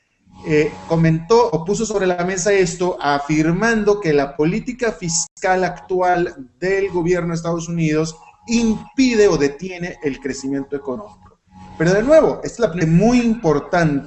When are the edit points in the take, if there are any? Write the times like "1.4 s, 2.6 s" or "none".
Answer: none

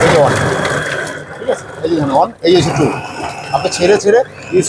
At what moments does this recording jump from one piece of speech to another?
none

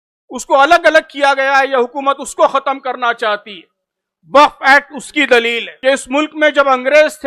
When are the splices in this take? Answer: 5.6 s

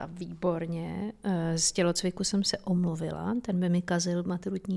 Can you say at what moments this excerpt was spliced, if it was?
none

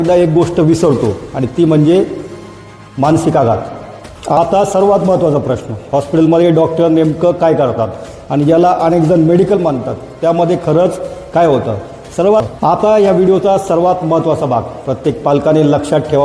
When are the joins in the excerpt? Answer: 4.4 s, 12.4 s

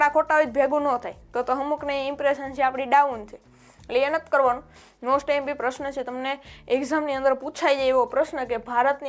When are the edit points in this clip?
4.7 s

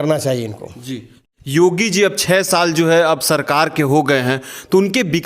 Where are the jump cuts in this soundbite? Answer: 1.1 s

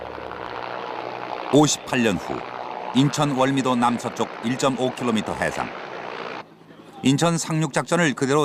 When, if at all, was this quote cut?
4.1 s

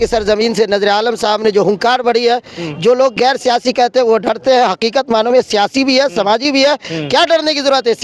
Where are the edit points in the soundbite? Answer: none

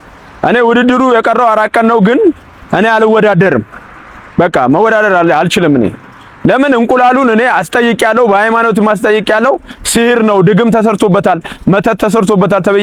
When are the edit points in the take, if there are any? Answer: none

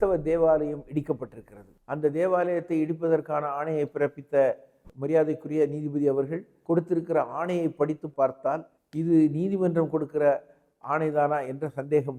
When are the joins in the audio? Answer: none

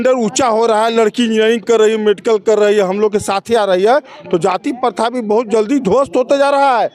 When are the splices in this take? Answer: none

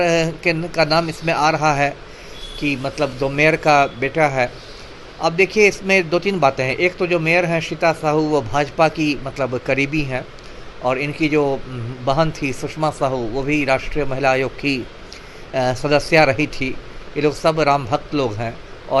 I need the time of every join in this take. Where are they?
none

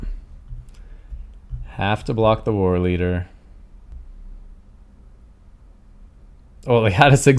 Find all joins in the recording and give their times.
3.9 s

